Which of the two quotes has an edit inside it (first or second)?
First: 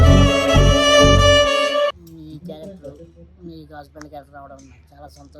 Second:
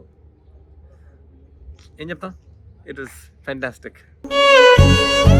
first